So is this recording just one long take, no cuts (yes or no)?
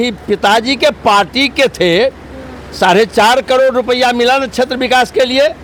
yes